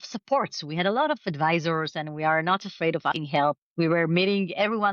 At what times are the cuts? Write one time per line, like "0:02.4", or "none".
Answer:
0:03.6